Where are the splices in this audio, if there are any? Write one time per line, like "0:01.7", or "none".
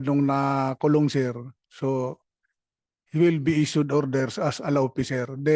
none